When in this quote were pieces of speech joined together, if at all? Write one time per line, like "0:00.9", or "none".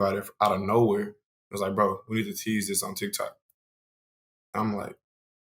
none